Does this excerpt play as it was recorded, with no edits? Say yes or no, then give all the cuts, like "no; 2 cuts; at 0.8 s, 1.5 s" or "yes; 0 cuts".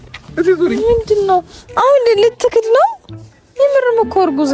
yes; 0 cuts